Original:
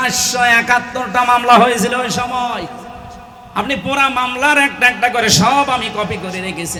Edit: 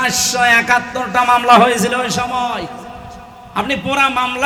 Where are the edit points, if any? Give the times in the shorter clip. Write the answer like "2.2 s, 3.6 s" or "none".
none